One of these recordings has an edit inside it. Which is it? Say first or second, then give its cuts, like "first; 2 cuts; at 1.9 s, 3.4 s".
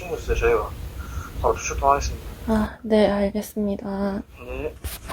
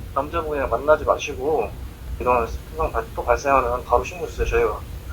second; 1 cut; at 2.1 s